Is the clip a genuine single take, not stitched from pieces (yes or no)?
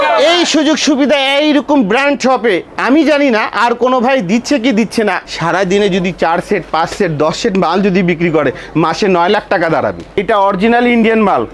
no